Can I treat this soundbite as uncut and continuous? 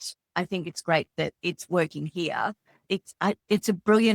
no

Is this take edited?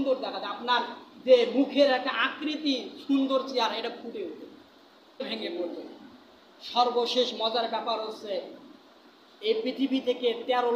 yes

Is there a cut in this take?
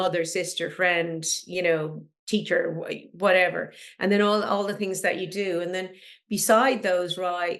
no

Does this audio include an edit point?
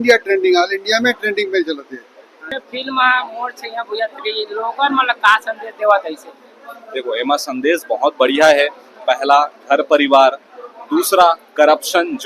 yes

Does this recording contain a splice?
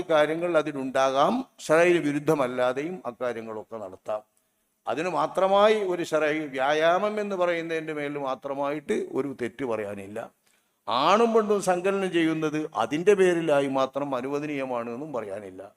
no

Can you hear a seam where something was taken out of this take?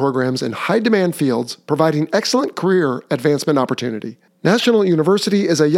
no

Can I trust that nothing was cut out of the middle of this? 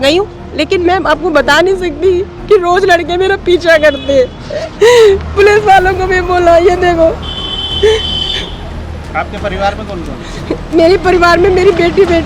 yes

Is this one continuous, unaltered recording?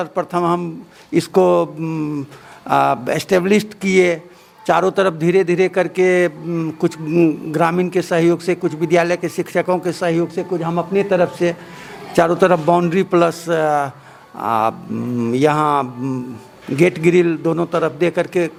yes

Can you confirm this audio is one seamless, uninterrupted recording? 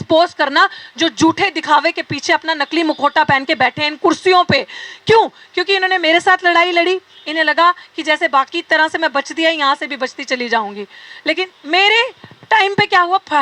yes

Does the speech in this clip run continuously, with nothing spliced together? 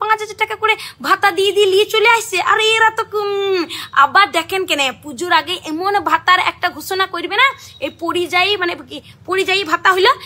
yes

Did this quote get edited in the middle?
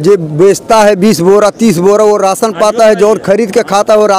no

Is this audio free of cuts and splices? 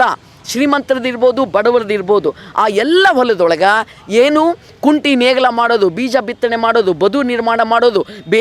yes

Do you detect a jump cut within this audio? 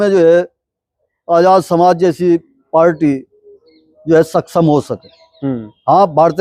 no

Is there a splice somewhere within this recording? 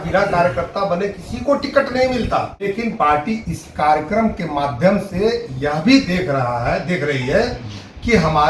yes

